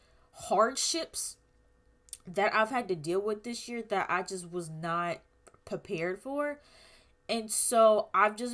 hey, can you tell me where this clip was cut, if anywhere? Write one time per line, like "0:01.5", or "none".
none